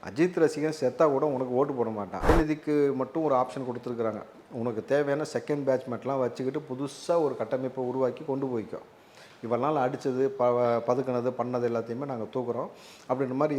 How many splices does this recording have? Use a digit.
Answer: 1